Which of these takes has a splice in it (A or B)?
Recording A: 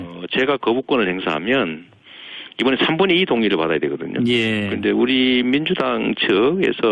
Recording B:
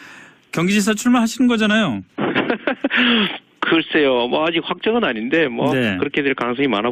A